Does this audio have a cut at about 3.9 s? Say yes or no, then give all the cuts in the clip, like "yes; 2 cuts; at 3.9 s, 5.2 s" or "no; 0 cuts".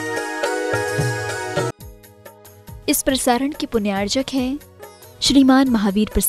no; 1 cut; at 1.7 s